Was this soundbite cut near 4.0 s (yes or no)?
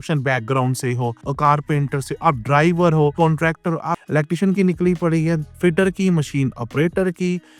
yes